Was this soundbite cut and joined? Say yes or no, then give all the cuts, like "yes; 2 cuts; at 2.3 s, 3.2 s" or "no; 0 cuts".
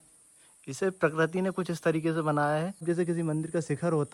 no; 0 cuts